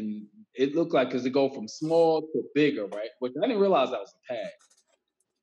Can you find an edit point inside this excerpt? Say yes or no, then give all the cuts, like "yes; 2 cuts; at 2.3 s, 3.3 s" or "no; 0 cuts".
no; 0 cuts